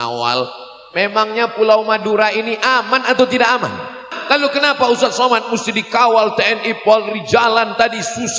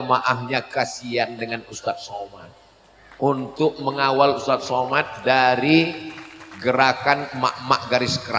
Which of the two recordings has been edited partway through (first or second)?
first